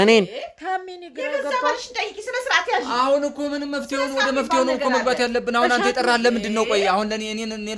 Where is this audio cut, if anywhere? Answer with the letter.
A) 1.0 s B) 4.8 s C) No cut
C